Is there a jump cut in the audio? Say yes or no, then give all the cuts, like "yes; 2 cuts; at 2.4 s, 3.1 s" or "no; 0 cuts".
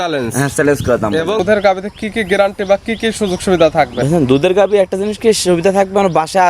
yes; 1 cut; at 1.4 s